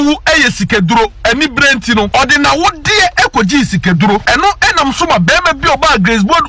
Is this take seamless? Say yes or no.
no